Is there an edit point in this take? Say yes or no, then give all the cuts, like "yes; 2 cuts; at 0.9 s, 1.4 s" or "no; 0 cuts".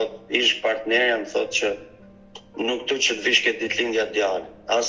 no; 0 cuts